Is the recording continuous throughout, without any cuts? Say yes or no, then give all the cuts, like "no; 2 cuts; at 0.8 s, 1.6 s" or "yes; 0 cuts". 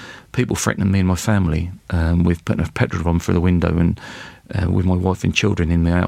yes; 0 cuts